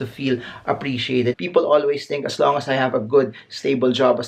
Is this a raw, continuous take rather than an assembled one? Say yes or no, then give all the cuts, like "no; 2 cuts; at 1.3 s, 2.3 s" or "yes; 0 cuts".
no; 1 cut; at 1.4 s